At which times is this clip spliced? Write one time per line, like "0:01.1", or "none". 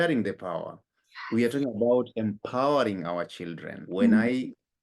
0:03.8